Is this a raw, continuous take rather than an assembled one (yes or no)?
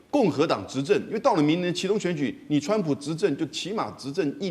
yes